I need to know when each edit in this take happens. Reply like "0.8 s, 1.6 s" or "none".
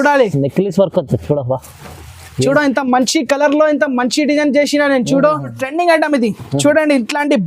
5.6 s

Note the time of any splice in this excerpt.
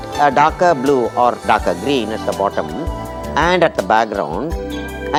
none

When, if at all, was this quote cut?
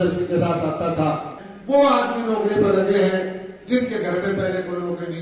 1.4 s

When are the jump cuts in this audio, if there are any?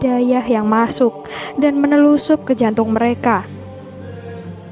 3.5 s

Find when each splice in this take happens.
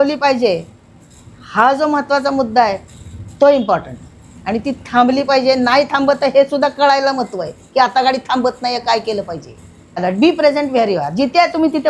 10.0 s

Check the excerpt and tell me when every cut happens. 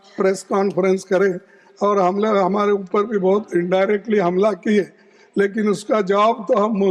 none

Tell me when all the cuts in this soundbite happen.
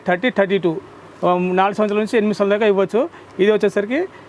none

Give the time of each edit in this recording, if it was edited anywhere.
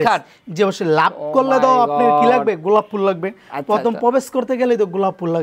none

